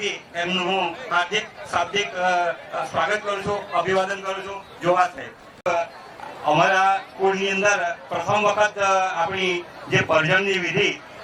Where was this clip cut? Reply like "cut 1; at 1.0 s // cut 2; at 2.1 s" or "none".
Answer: none